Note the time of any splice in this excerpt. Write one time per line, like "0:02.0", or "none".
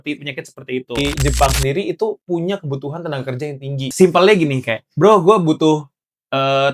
0:01.0
0:03.9